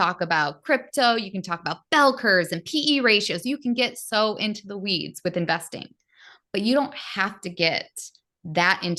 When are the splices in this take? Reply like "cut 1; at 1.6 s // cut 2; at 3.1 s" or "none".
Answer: none